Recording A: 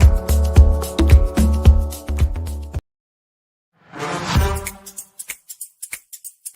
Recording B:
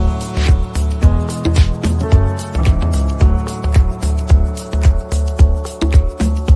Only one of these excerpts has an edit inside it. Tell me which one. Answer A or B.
A